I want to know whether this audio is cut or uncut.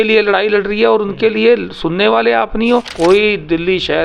cut